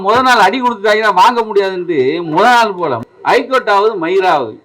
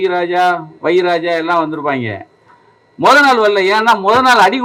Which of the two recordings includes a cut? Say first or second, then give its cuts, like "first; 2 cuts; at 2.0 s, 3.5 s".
first; 1 cut; at 3.0 s